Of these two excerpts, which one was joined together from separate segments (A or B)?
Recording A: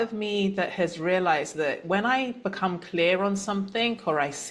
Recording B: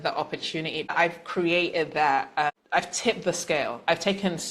B